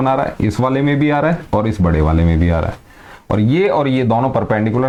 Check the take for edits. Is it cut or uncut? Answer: uncut